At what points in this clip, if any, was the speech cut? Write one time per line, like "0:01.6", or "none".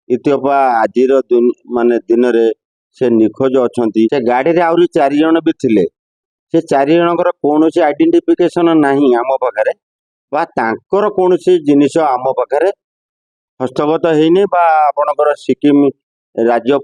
0:04.1